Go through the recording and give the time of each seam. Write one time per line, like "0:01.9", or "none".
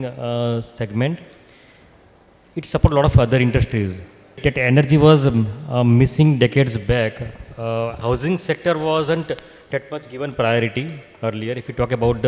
0:04.4
0:08.0